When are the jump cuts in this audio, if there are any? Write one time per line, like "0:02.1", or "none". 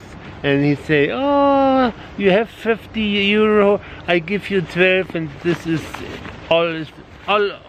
none